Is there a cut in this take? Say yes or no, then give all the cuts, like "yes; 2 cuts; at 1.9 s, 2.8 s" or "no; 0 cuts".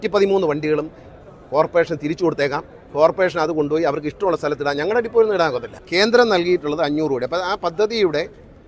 yes; 1 cut; at 5.7 s